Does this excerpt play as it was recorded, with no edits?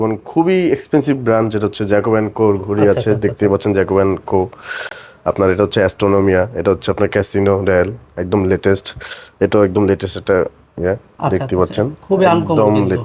yes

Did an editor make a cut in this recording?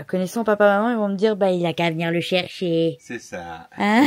no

